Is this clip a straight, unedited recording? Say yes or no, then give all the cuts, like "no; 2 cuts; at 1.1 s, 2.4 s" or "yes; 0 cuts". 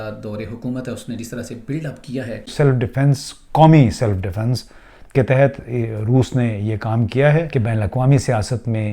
no; 2 cuts; at 2.5 s, 7.5 s